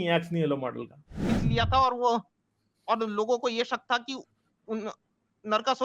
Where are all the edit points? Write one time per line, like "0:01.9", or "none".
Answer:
0:01.2